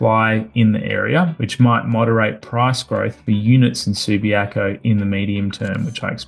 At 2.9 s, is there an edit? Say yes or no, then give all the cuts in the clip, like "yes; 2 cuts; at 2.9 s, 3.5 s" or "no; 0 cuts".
no; 1 cut; at 1.4 s